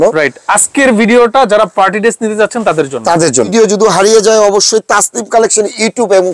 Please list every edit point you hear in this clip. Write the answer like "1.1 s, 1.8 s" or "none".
3.5 s